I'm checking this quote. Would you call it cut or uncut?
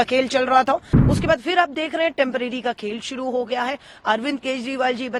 cut